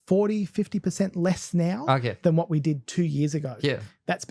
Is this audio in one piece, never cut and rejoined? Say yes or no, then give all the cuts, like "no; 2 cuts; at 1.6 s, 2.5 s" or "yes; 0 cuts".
yes; 0 cuts